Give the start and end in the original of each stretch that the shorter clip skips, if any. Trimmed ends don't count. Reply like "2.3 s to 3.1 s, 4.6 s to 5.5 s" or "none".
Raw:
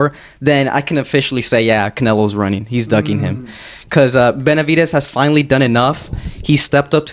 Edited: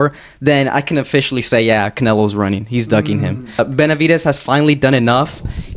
3.6 s to 4.3 s